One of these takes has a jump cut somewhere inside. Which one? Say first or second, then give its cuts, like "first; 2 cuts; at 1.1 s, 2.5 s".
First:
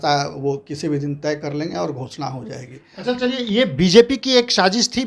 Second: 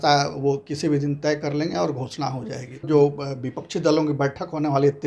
second; 1 cut; at 2.8 s